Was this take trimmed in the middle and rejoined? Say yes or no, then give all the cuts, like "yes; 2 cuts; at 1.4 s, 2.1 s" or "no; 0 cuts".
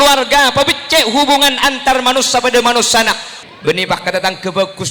yes; 1 cut; at 3.3 s